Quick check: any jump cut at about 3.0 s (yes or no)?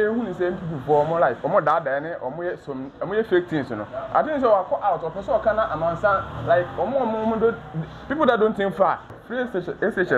no